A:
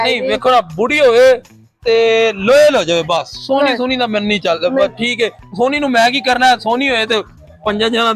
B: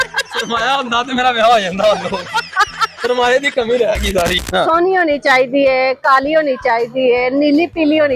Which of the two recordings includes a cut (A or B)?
B